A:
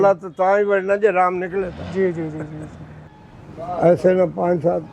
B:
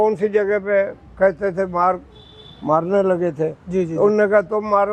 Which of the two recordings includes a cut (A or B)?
A